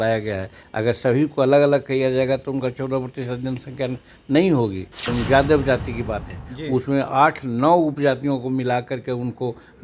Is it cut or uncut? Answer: cut